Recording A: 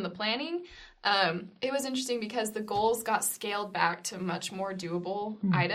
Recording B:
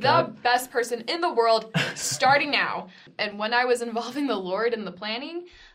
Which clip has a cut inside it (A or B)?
B